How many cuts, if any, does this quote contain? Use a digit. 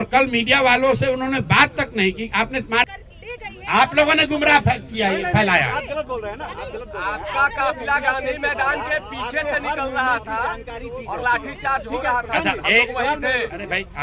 1